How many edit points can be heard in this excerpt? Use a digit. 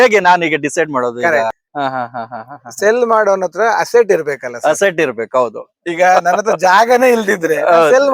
1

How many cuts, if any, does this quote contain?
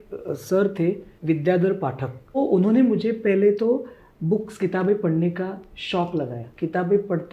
3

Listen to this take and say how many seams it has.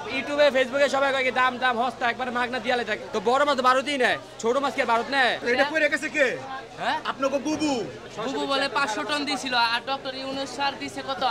3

